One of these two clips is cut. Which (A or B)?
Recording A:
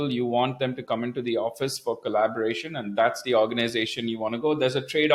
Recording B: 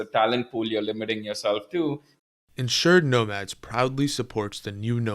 B